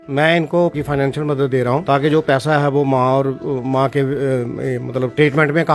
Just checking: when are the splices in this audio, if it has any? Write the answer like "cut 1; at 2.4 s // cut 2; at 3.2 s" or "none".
cut 1; at 0.7 s // cut 2; at 1.8 s